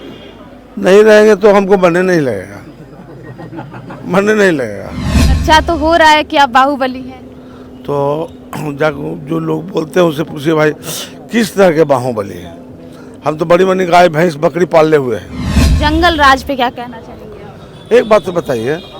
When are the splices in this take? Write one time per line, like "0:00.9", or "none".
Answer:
0:05.4
0:15.7